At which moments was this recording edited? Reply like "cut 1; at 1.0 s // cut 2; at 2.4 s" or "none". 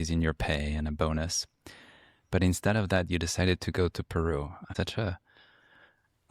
cut 1; at 4.7 s